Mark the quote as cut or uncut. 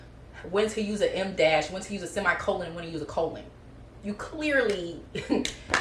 uncut